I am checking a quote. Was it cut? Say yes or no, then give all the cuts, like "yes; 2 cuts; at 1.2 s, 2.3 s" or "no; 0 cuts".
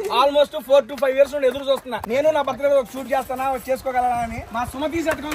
yes; 2 cuts; at 2.0 s, 4.4 s